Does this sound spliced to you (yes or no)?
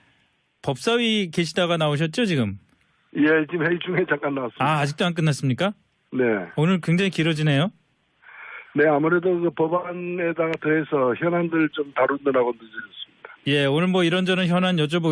yes